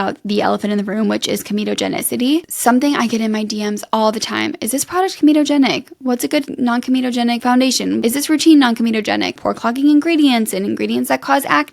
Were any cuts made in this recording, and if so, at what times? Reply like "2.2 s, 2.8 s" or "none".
2.4 s, 9.3 s